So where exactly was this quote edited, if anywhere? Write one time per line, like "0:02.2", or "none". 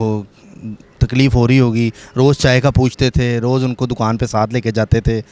none